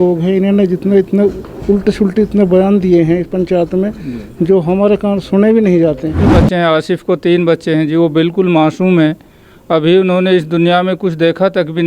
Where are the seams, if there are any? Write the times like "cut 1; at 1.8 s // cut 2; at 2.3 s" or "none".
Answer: cut 1; at 6.2 s